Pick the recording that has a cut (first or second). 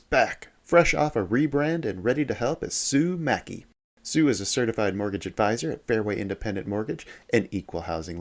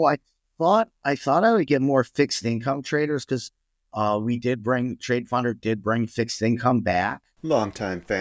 second